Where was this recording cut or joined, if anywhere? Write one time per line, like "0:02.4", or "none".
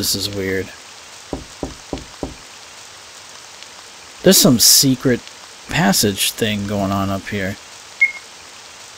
0:01.8